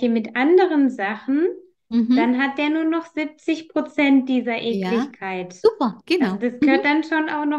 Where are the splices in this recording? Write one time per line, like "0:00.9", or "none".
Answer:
none